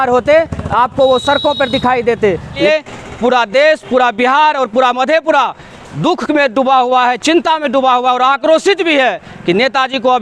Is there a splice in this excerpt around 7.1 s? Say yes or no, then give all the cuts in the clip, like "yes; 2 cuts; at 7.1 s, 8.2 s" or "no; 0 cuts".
no; 1 cut; at 2.6 s